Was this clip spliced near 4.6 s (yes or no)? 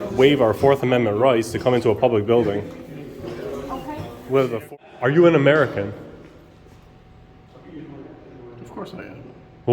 yes